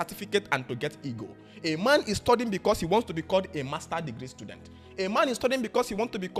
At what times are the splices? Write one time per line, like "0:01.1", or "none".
none